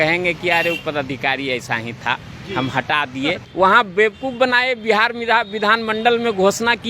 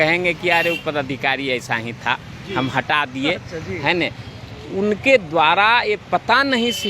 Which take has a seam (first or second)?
first